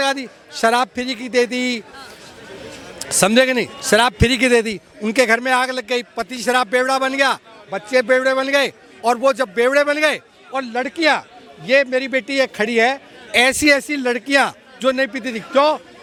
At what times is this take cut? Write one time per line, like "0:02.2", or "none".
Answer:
none